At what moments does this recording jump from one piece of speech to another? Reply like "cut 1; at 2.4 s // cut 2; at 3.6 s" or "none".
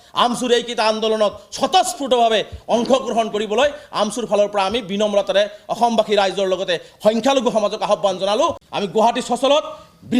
cut 1; at 8.6 s